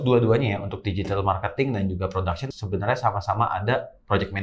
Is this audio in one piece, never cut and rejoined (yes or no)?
yes